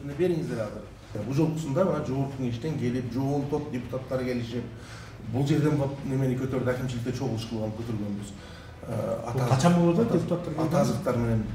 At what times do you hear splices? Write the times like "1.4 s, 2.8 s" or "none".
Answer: 1.2 s